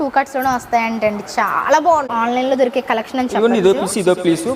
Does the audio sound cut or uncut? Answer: cut